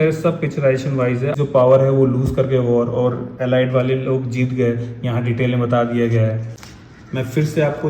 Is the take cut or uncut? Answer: cut